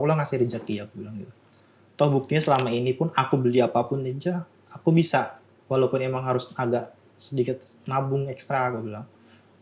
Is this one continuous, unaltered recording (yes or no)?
yes